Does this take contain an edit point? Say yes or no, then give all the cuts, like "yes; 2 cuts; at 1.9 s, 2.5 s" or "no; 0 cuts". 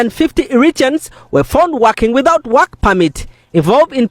no; 0 cuts